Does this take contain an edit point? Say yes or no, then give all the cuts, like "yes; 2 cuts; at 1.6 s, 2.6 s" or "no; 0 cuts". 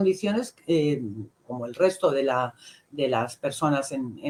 no; 0 cuts